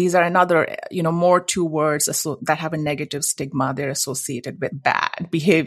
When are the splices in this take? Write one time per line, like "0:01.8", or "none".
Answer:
0:04.8

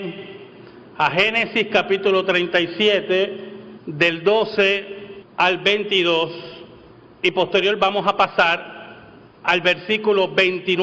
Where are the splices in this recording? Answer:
0:01.8

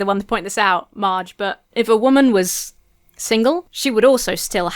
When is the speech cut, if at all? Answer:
0:01.6
0:03.7

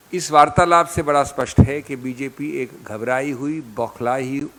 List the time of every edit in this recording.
none

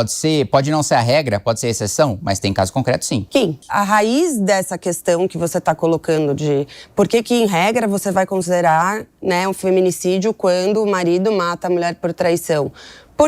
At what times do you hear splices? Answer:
0:03.6

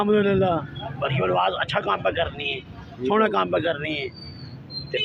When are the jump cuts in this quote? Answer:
none

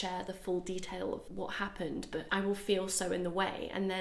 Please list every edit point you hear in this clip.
0:01.3

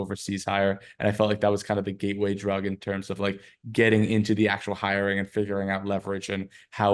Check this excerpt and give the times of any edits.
none

